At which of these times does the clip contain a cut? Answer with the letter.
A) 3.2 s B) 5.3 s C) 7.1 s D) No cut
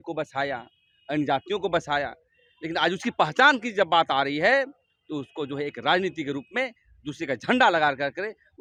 D